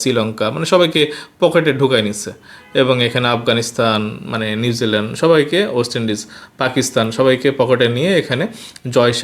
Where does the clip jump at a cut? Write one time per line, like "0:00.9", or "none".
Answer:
none